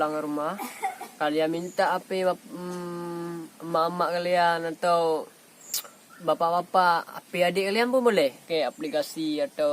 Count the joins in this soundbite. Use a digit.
1